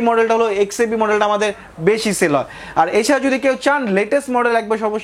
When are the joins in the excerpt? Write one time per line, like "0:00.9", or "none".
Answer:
none